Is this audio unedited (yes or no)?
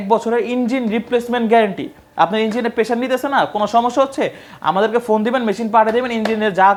yes